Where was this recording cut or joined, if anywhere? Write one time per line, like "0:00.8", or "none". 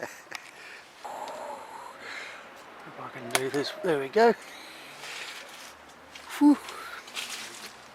0:01.0